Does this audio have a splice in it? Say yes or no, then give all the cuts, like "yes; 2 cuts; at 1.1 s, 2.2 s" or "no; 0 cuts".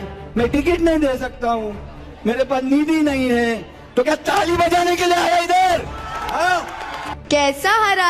yes; 1 cut; at 7.2 s